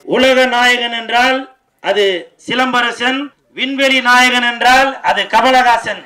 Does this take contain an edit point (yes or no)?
yes